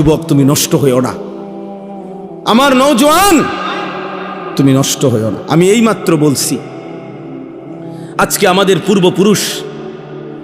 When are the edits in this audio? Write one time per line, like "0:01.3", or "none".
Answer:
0:01.1
0:02.4
0:06.6
0:08.1